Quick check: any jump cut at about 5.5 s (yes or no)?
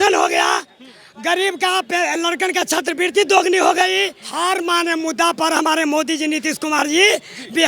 no